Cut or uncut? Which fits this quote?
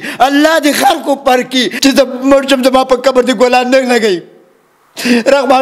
cut